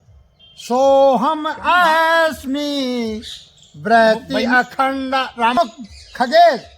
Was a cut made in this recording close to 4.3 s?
no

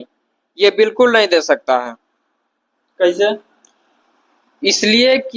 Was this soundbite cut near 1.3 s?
no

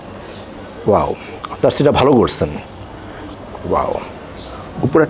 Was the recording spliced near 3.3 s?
yes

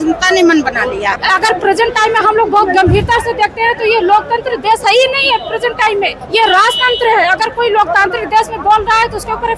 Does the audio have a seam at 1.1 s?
yes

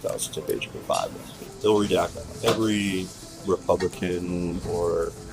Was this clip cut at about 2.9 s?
no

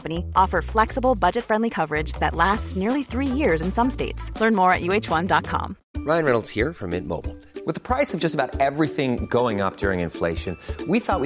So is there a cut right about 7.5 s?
no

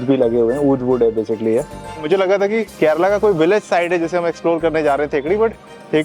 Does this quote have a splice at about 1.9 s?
yes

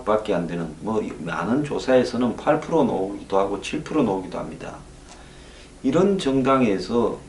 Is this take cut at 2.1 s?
yes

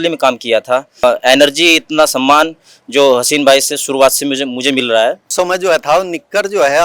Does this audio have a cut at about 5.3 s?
yes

